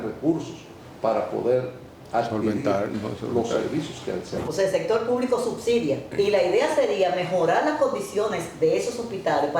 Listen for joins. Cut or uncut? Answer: cut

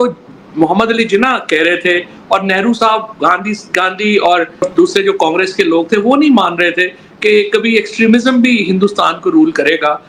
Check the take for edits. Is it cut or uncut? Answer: cut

